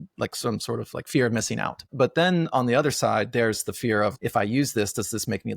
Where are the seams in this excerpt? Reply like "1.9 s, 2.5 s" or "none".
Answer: 1.9 s, 4.1 s